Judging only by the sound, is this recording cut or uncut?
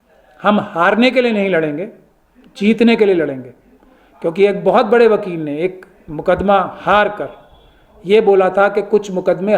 uncut